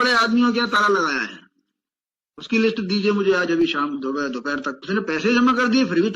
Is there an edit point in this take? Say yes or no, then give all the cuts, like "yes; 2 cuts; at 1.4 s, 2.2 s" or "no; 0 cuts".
no; 0 cuts